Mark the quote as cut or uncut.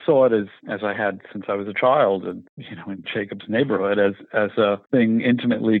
uncut